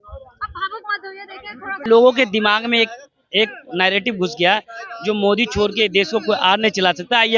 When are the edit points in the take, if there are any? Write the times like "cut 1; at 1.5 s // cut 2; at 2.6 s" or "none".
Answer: cut 1; at 1.8 s